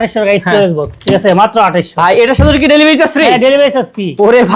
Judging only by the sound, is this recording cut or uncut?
uncut